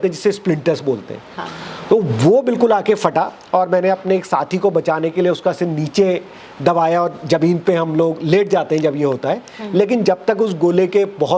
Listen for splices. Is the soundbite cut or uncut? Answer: uncut